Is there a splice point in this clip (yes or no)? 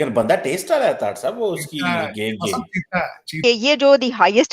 yes